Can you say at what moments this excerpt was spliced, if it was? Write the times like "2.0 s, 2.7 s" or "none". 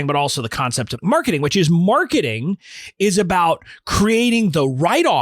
0.9 s